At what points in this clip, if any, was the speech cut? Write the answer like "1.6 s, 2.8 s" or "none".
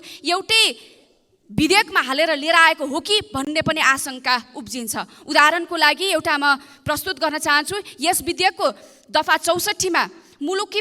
none